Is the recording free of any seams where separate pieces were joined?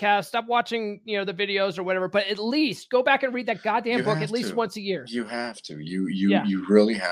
yes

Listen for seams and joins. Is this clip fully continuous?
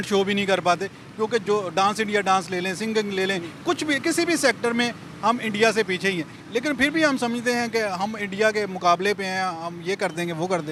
yes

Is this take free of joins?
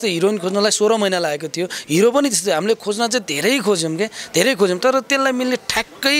yes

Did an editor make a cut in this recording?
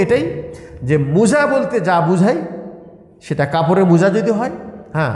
no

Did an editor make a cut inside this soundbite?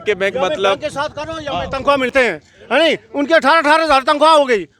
yes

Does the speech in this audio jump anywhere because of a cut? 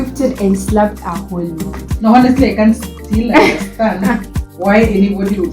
yes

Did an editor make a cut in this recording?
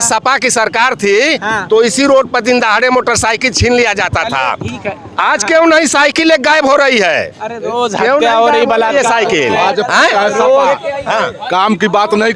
no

